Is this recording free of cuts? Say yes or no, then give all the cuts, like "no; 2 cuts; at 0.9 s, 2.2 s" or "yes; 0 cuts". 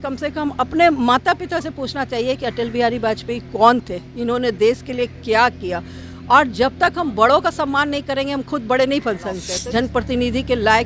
no; 1 cut; at 9.5 s